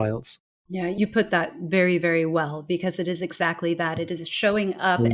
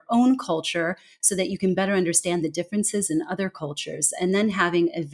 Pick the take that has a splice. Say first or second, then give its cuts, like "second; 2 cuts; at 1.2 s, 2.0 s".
first; 1 cut; at 0.9 s